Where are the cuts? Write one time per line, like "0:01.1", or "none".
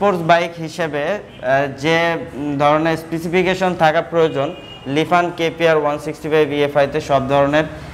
none